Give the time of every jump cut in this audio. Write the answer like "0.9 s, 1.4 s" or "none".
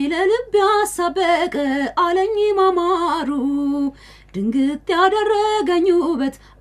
none